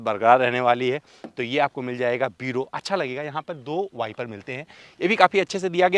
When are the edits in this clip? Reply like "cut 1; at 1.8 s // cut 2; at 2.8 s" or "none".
none